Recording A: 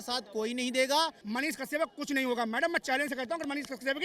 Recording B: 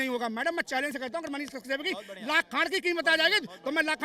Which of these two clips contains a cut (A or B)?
A